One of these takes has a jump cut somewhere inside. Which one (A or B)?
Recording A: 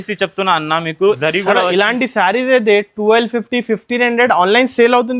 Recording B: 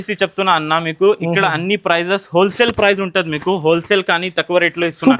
A